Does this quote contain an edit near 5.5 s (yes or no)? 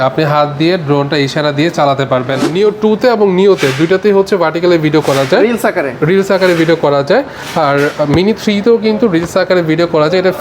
no